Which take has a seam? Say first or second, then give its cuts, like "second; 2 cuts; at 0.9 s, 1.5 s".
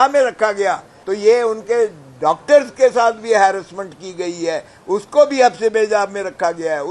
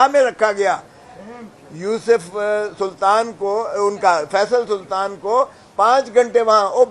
first; 1 cut; at 0.9 s